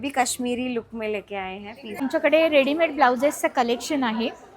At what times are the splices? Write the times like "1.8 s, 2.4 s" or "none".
2.0 s